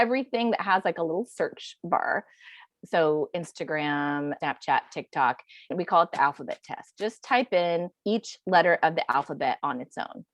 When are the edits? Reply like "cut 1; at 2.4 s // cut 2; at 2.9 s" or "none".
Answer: cut 1; at 2.6 s // cut 2; at 4.4 s // cut 3; at 5.7 s // cut 4; at 7.9 s